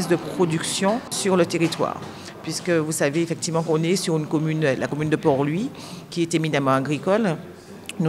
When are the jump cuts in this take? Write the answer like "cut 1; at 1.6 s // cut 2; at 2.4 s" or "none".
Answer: cut 1; at 1.2 s